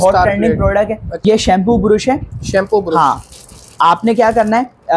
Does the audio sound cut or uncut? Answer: cut